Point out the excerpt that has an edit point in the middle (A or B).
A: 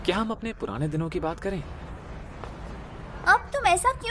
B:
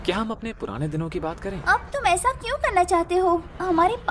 B